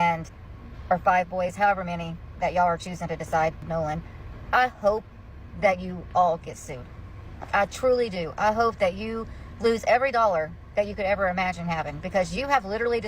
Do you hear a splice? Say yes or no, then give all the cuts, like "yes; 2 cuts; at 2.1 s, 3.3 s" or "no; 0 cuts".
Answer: yes; 1 cut; at 3.6 s